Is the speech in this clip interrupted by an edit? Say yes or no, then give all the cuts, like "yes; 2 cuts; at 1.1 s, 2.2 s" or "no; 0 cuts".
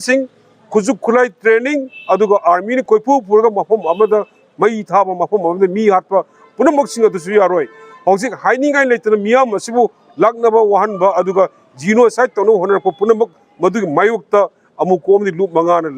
no; 0 cuts